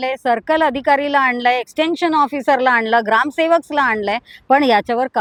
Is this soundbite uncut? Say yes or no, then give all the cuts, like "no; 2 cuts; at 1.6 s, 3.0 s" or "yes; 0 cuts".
yes; 0 cuts